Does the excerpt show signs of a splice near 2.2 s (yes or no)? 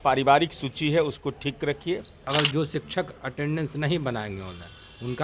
yes